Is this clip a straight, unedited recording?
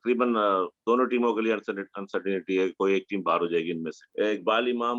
no; 1 cut; at 4.0 s

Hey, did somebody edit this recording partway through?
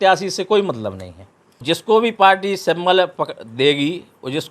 yes; 1 cut; at 1.6 s

